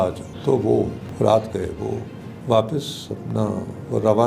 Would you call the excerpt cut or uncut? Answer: cut